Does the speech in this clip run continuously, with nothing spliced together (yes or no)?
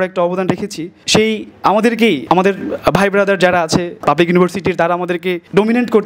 no